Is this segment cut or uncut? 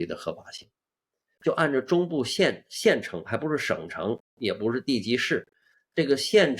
cut